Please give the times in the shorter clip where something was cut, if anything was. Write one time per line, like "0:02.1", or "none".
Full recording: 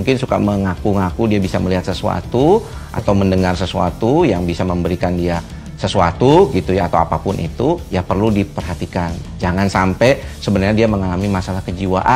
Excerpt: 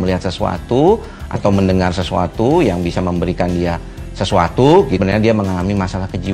0:05.0